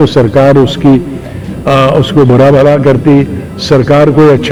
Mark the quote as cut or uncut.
uncut